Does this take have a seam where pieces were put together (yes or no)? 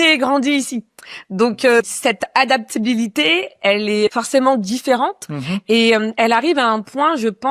no